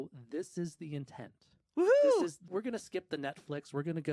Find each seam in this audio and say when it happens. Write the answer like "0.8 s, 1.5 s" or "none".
2.5 s